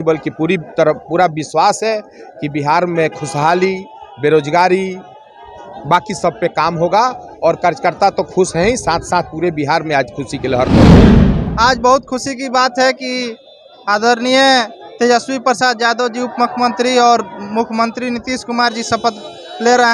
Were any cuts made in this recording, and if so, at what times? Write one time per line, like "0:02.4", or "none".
none